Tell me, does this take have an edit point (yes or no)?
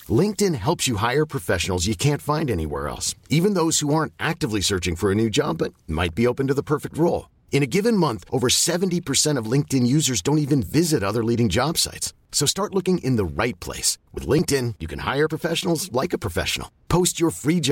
no